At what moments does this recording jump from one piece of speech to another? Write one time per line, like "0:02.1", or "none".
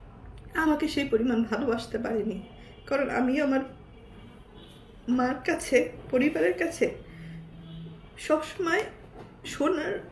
none